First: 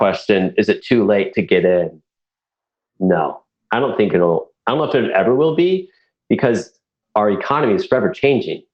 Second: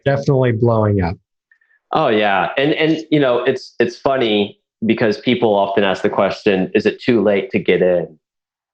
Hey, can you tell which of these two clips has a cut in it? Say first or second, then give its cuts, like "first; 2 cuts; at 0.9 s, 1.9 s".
first; 1 cut; at 6.9 s